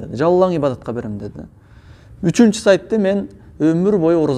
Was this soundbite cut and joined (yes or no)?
no